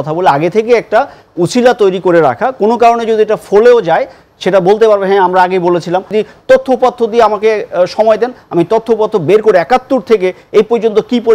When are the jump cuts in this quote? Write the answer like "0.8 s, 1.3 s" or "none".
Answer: 6.1 s